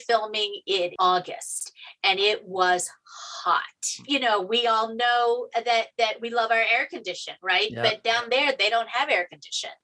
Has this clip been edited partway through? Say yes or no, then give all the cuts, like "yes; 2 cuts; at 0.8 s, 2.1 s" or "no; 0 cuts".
yes; 1 cut; at 4.0 s